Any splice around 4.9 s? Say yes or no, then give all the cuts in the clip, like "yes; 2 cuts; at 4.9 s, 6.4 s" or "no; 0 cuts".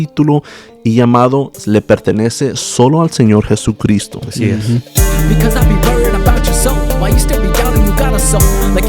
yes; 1 cut; at 4.9 s